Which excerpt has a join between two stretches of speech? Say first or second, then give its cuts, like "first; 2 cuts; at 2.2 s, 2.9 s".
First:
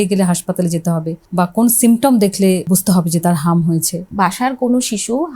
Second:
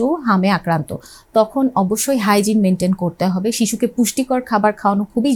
first; 3 cuts; at 1.2 s, 2.7 s, 4.1 s